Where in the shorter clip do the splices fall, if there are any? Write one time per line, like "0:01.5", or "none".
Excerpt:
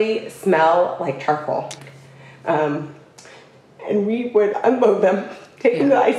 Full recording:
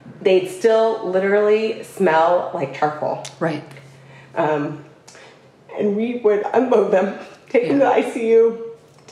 0:01.8